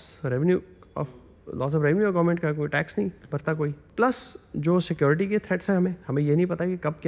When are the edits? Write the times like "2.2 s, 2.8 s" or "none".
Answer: 3.8 s, 6.0 s